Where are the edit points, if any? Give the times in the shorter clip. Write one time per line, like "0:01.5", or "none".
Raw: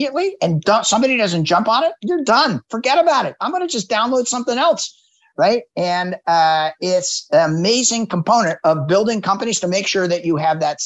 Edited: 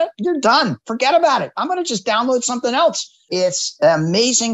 0:03.3